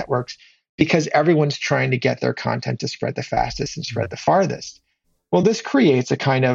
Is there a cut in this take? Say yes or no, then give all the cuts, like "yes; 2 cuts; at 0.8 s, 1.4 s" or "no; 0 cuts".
no; 0 cuts